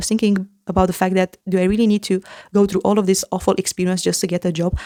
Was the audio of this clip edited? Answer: no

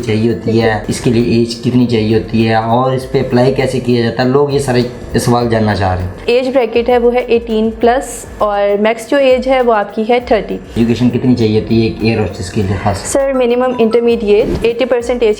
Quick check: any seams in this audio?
yes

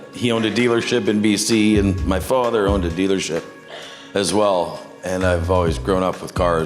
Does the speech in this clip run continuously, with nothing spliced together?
yes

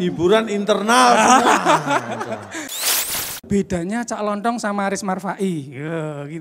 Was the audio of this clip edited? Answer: yes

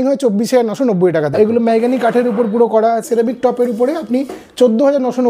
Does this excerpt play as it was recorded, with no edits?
no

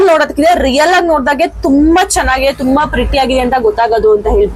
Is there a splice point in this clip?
no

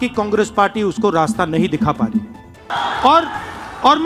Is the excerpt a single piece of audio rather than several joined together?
no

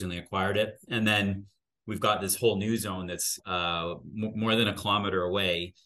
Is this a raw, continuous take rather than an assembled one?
no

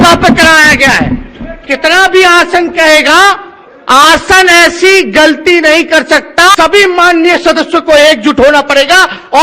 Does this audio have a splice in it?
yes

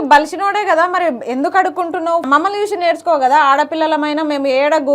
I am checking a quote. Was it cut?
yes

